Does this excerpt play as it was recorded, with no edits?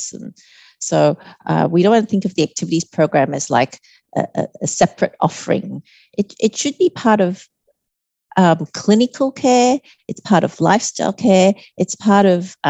yes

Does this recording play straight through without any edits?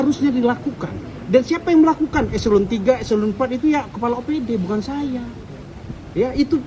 yes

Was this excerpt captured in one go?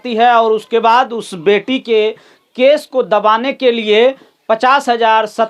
yes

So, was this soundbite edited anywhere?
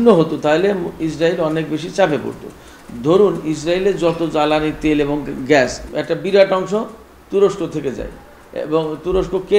yes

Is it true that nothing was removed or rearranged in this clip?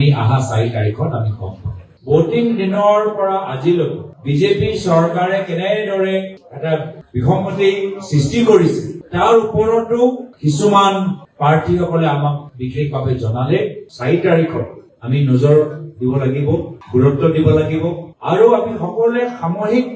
no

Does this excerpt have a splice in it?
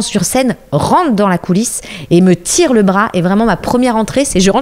no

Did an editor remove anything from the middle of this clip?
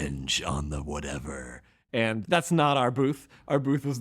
yes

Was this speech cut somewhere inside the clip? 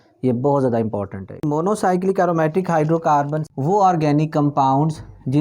yes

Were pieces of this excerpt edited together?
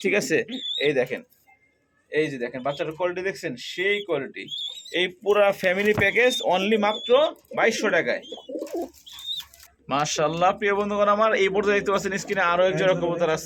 no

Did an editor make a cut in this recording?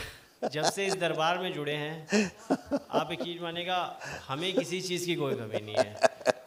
no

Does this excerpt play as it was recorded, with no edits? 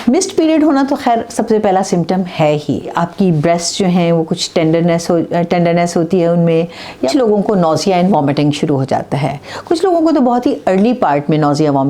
no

